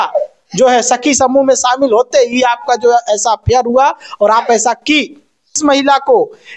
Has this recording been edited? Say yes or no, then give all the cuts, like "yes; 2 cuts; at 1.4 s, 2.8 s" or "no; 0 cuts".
yes; 1 cut; at 5.6 s